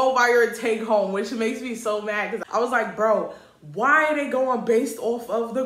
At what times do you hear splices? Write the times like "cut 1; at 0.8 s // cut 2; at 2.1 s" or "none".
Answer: cut 1; at 2.4 s